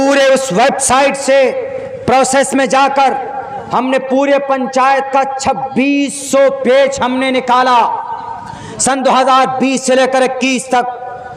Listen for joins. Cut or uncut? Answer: uncut